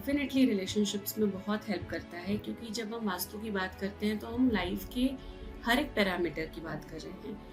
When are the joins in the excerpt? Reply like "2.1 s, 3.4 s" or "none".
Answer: none

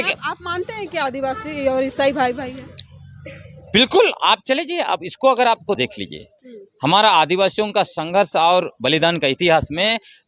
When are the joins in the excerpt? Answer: 5.8 s

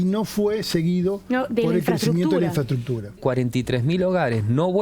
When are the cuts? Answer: 3.2 s

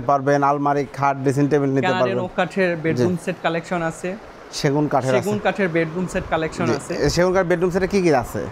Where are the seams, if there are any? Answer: none

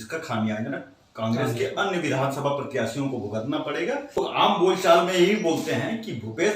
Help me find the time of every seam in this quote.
4.2 s

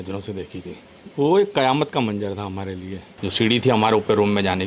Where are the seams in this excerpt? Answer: 0.9 s, 3.0 s

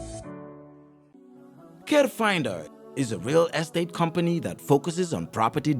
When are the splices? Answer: 1.1 s

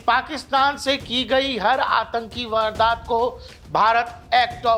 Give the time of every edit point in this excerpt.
none

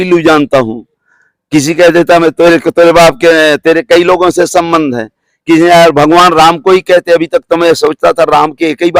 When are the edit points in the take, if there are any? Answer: none

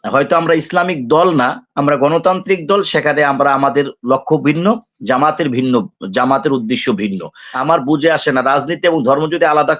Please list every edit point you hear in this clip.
7.5 s

